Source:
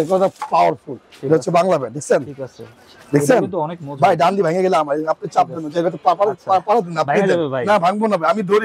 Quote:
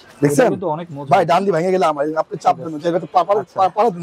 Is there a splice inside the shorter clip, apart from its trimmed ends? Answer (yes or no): no